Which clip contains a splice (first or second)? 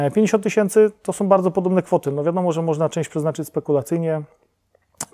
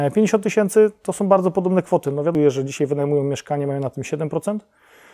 second